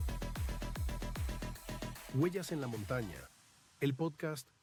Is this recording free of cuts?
yes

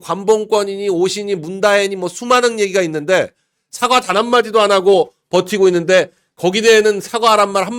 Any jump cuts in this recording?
no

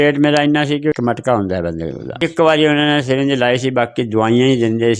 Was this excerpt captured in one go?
no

